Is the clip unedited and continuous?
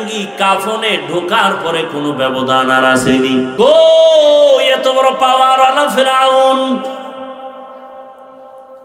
no; 1 cut; at 3.5 s

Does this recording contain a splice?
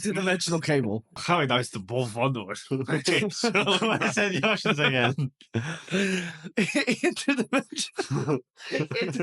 yes; 1 cut; at 1.1 s

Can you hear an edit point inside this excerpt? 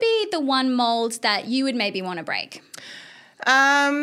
no; 0 cuts

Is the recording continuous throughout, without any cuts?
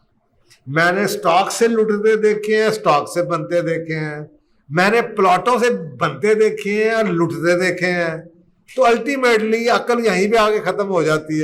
yes; 0 cuts

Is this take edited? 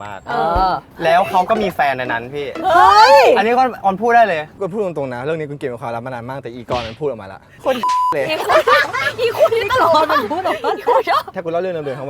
yes; 4 cuts; at 0.9 s, 4.5 s, 7.5 s, 11.3 s

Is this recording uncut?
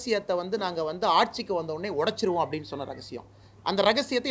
yes; 0 cuts

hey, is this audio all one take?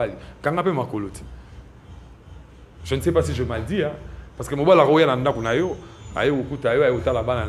yes; 0 cuts

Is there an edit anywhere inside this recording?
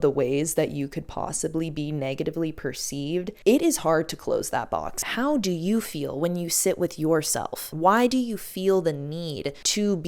yes; 1 cut; at 5.0 s

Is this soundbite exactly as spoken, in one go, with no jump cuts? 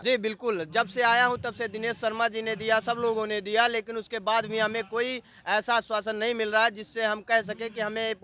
yes; 0 cuts

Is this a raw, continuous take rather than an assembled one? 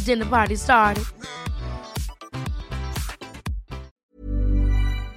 no; 1 cut; at 3.9 s

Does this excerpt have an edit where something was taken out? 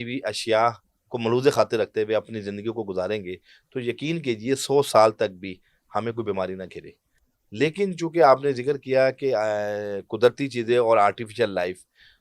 no; 0 cuts

